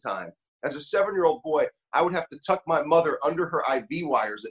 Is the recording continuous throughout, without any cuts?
yes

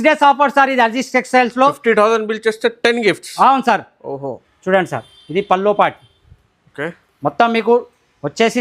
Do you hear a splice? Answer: yes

